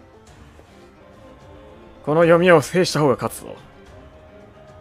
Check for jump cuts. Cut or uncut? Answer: cut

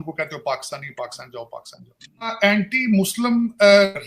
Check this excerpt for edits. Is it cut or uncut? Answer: cut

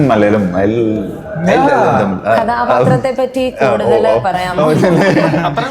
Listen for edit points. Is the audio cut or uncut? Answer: uncut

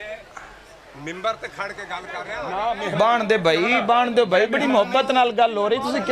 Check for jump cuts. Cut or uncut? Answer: cut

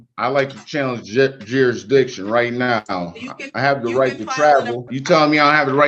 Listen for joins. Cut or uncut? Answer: cut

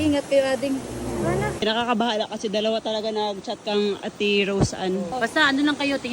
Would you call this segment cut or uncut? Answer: cut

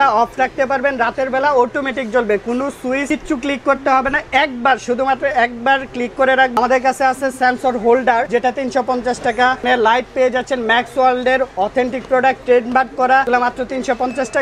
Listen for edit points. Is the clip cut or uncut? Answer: cut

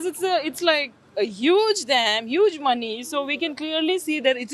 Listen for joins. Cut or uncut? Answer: uncut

